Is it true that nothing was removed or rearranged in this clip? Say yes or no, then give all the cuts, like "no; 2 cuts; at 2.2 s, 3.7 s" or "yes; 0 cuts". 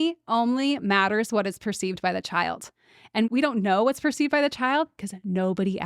no; 1 cut; at 3.3 s